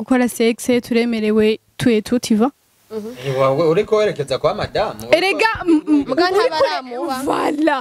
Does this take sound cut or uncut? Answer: uncut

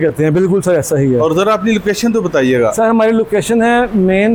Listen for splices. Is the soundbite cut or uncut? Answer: uncut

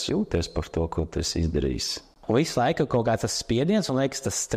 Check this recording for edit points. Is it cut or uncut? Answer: cut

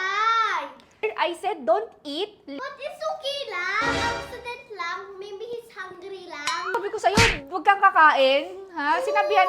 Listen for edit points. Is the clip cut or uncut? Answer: cut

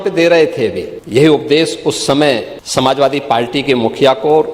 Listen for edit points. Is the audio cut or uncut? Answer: cut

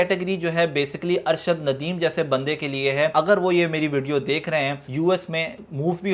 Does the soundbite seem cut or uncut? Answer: cut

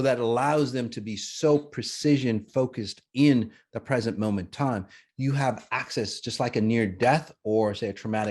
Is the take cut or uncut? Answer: cut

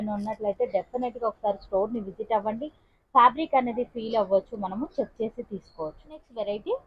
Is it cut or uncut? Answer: uncut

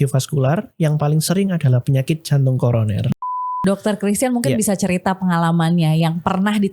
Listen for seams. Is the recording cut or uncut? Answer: cut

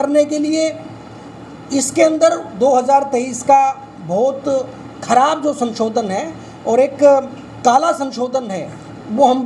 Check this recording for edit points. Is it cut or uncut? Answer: uncut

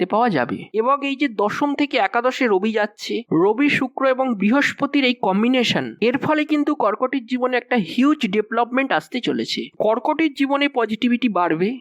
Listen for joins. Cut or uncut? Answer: cut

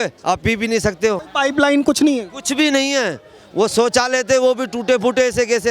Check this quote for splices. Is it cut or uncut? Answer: cut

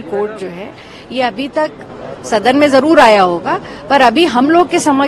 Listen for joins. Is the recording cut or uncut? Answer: uncut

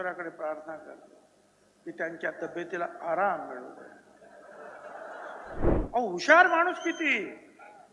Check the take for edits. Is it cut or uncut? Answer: cut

